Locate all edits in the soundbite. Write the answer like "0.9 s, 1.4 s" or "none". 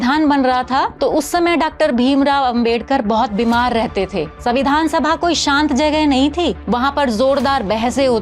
0.9 s, 4.3 s, 6.6 s